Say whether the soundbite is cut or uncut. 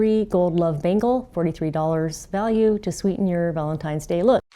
uncut